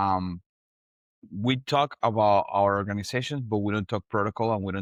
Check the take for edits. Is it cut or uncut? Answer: uncut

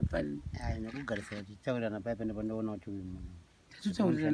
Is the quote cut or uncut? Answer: uncut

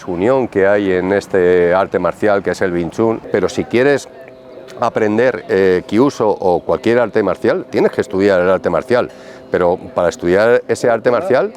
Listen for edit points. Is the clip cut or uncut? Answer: cut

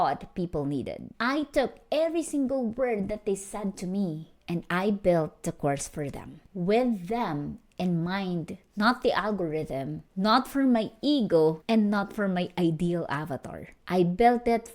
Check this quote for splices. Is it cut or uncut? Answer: cut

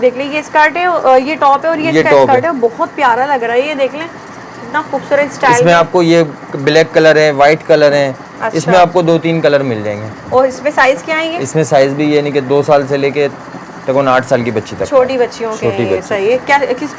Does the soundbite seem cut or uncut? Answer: uncut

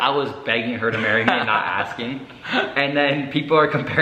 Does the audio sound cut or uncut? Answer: uncut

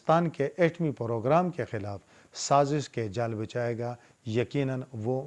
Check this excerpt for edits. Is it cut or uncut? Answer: uncut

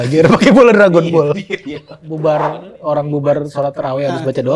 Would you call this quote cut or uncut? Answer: cut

